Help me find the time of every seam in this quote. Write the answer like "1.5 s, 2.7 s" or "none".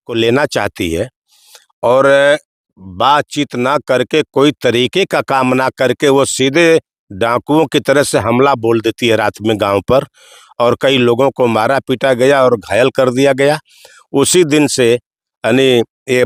none